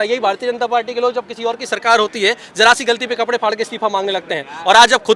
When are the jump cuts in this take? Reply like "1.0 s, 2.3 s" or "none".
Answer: none